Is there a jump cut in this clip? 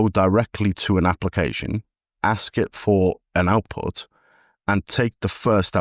no; 0 cuts

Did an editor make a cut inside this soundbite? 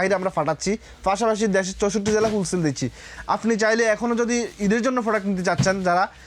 no; 0 cuts

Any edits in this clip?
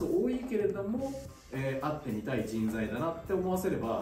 no; 0 cuts

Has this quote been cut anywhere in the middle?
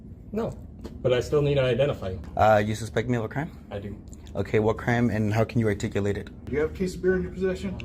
yes; 2 cuts; at 2.2 s, 6.4 s

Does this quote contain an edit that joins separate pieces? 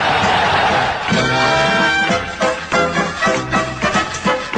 no; 0 cuts

